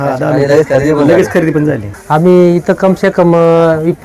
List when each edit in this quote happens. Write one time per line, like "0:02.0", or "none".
0:02.0